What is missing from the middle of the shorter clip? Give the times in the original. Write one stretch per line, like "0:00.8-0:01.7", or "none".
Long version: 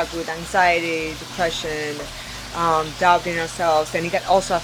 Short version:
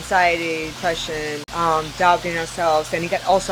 0:01.3-0:01.9

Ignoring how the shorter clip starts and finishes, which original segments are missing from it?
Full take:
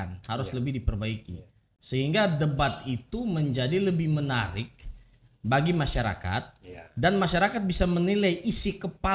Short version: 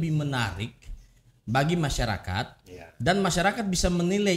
none

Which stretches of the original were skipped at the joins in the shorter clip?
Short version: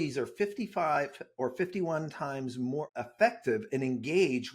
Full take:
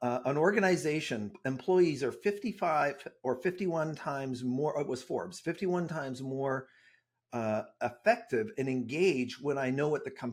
0:04.7-0:07.7

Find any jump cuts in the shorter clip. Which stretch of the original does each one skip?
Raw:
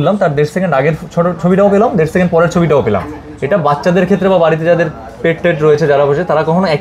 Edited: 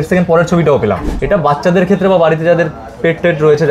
0:03.1-0:03.3

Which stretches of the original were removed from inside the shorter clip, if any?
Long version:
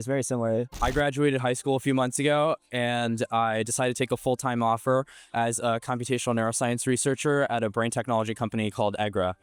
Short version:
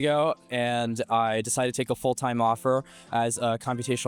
none

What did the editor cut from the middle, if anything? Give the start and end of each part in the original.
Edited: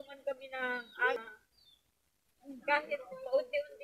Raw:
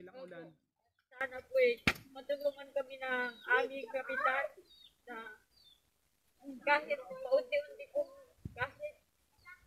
0:03.7-0:05.2

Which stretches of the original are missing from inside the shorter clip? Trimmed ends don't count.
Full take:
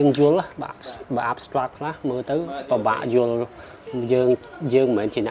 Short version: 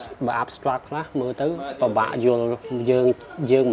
0:03.6-0:03.9

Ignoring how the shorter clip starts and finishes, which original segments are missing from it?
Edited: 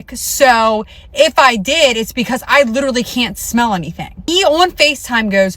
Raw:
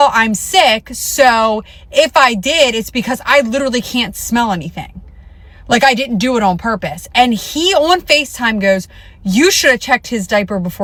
0:05.0-0:07.5

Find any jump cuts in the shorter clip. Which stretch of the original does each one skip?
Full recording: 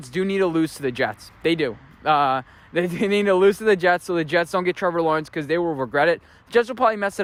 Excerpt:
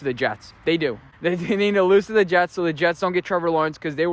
0:01.8-0:02.6

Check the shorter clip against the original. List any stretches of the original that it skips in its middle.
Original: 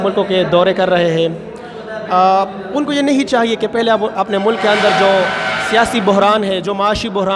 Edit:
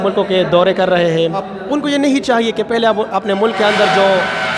0:01.5-0:02.6

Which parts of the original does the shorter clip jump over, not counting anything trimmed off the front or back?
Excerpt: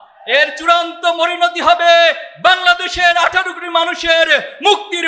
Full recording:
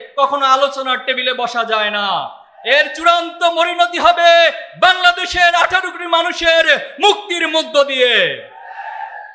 none

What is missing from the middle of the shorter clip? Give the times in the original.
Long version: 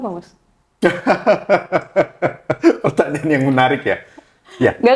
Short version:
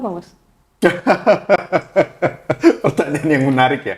none

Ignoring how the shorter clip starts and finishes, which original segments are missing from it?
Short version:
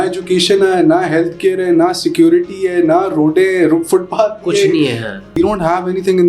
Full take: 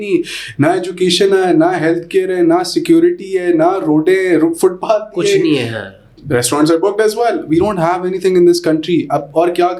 0:06.0-0:07.5

